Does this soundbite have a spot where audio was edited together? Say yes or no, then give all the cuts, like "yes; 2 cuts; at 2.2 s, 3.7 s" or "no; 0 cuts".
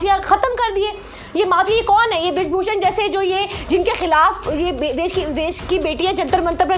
no; 0 cuts